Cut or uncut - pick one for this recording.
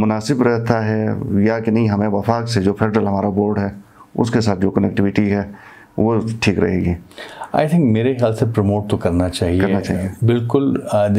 uncut